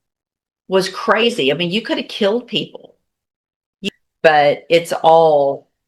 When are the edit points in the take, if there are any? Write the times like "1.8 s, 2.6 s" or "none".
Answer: 3.7 s